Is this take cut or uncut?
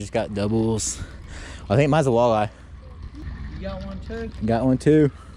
cut